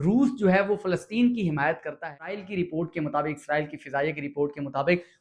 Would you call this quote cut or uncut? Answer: cut